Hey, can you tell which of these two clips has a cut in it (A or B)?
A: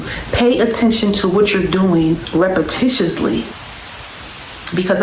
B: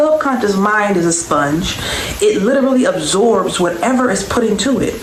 A